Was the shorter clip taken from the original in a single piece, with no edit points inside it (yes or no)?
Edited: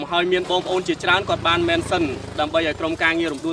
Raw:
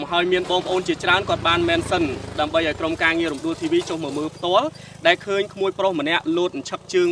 yes